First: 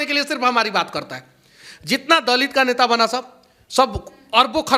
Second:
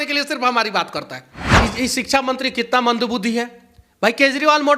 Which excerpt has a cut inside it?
second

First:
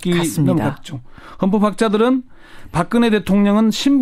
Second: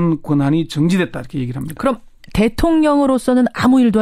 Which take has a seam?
first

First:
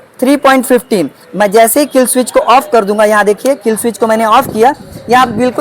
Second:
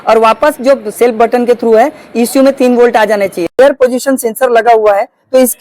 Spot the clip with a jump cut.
second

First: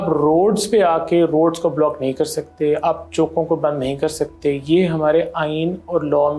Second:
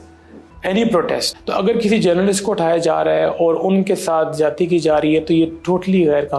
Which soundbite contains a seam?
second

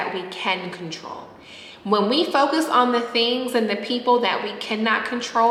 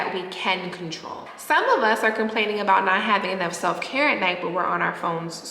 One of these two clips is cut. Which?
second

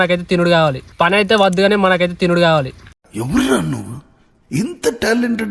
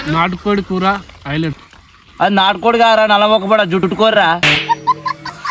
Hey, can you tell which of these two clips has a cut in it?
second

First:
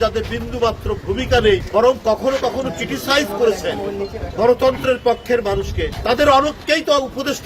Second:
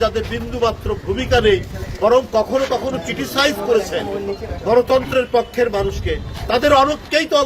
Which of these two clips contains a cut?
first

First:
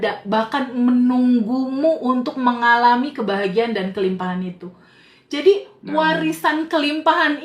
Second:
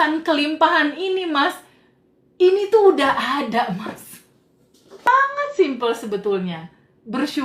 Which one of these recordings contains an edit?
second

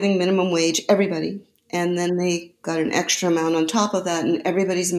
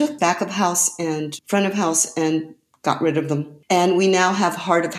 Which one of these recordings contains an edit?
second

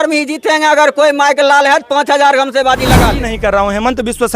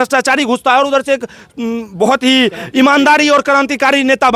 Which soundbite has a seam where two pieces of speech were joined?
first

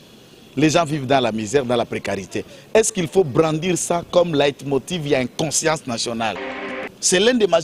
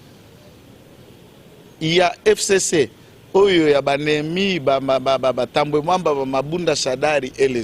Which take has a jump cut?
first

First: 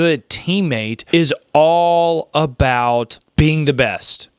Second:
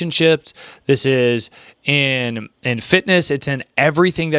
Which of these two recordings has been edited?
first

